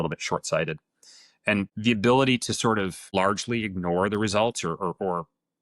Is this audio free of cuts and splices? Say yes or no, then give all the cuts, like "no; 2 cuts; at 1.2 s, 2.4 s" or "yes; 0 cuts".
no; 2 cuts; at 1.7 s, 3.1 s